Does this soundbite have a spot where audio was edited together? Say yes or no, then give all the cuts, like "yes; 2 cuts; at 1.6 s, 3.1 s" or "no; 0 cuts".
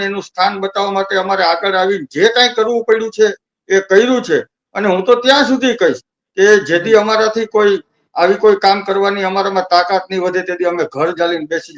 no; 0 cuts